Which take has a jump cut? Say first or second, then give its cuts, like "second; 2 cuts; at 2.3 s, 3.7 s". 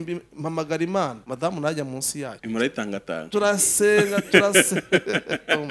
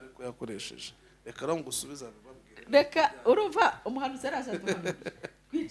first; 2 cuts; at 1.2 s, 2.4 s